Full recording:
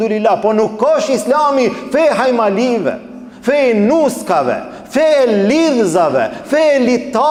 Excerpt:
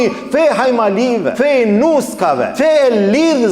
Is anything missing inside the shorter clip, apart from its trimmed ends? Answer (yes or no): yes